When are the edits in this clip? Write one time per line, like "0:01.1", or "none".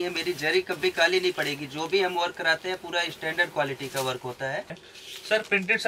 0:04.8